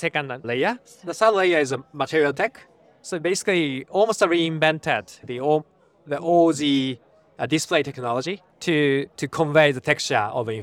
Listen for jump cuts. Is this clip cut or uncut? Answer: cut